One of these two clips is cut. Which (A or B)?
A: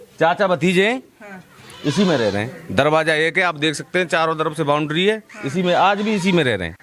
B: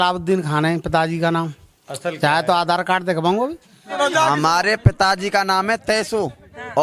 B